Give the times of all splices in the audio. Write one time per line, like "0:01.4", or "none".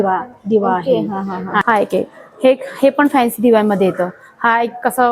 0:01.6

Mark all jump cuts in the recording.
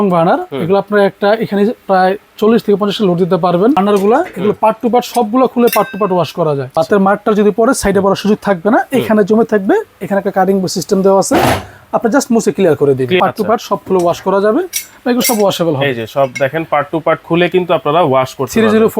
0:03.8
0:06.7
0:13.2

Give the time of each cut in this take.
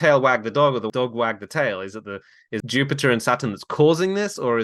0:00.9
0:02.6

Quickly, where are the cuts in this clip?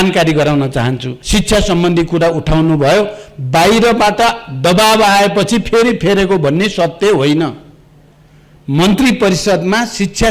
0:01.1

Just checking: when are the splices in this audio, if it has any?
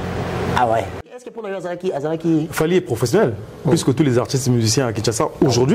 0:01.2

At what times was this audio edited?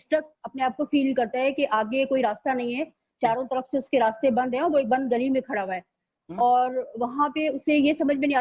none

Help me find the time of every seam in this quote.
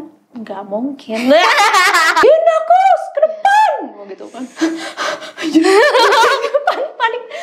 0:02.2

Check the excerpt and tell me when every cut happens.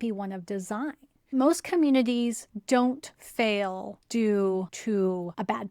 0:01.3
0:02.8
0:03.9
0:04.7

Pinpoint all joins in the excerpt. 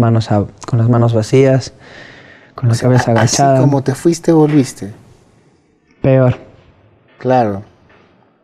none

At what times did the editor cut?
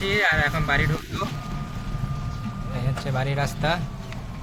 none

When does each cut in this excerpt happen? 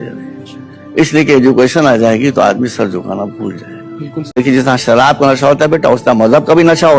0:04.4

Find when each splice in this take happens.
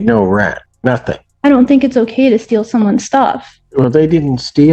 0:00.9
0:03.5

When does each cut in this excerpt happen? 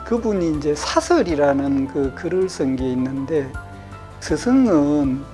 0:04.1

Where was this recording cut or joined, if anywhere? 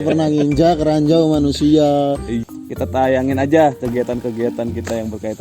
0:02.4

